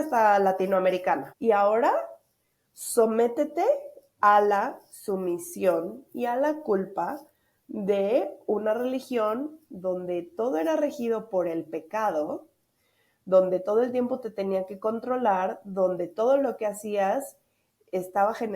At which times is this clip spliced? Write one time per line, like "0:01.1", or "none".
0:01.3